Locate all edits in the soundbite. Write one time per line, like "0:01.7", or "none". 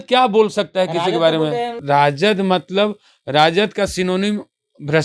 0:01.8